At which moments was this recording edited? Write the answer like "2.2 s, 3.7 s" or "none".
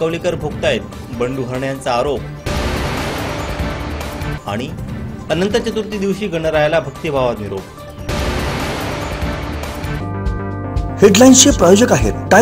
none